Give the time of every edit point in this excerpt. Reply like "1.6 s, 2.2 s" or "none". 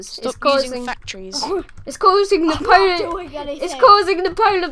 none